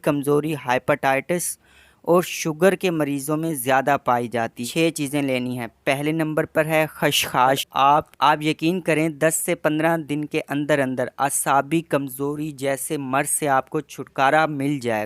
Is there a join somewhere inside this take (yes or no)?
yes